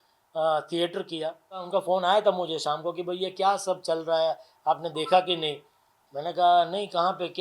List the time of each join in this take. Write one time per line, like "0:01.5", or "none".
0:01.6